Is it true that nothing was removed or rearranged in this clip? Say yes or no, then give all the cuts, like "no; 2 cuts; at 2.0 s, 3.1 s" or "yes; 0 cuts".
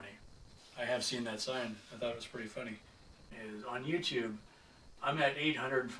no; 1 cut; at 3.2 s